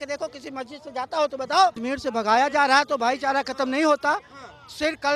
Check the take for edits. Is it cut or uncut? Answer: cut